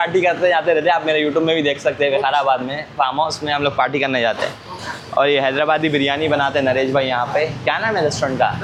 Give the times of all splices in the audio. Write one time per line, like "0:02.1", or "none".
none

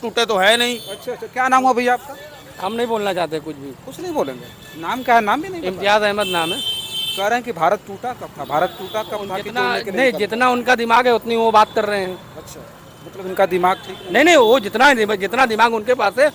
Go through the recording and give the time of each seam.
none

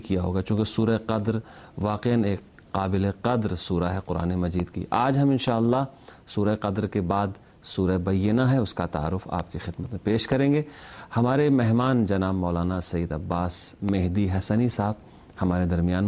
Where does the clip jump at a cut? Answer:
0:05.0

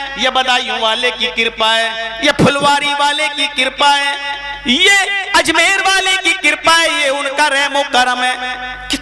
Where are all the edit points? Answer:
none

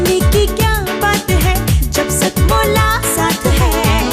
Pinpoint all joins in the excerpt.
none

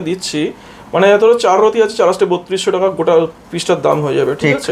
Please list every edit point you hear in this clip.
none

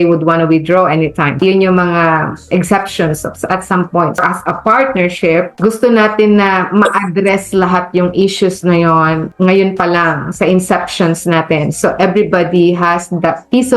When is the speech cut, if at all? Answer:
0:01.4
0:04.2

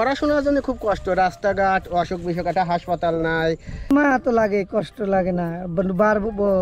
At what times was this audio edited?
0:03.7

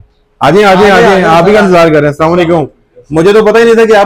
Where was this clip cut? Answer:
none

